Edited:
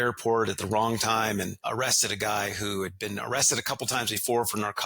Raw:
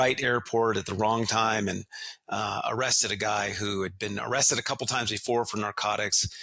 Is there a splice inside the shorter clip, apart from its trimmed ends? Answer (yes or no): yes